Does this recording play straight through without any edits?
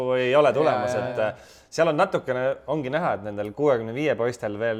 yes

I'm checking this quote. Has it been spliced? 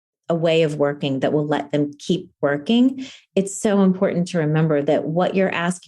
yes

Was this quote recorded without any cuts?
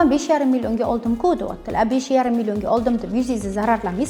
yes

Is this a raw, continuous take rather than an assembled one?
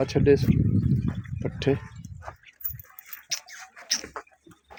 yes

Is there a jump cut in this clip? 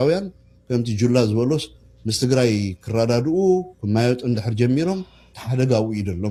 no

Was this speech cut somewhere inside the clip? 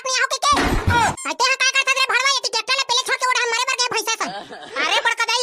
yes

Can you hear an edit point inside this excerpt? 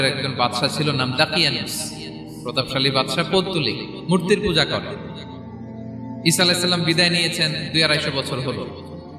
no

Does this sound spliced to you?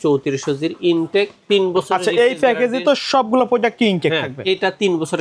no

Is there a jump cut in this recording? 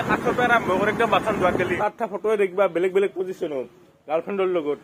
yes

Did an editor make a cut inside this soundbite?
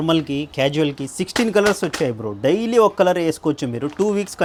no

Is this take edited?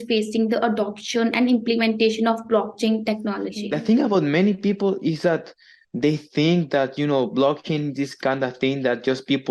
yes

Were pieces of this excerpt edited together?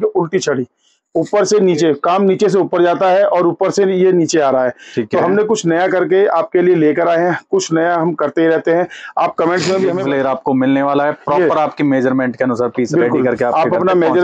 yes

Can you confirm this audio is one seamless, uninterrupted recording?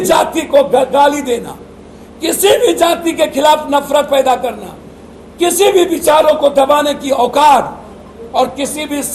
yes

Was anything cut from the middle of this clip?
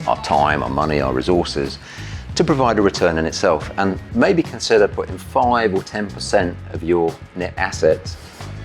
yes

